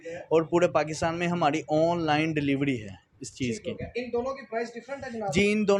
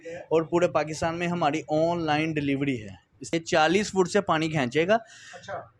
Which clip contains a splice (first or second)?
second